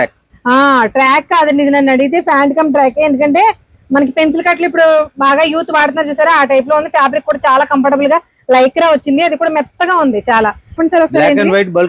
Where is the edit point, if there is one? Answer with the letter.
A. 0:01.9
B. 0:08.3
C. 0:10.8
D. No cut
C